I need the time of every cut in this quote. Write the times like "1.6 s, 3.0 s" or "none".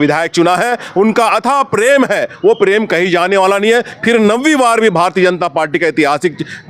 none